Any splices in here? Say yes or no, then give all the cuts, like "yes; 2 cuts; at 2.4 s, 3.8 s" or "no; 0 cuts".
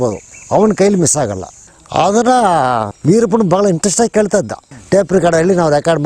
yes; 1 cut; at 1.7 s